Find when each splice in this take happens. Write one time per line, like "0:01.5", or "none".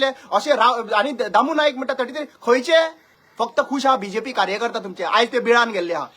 0:03.1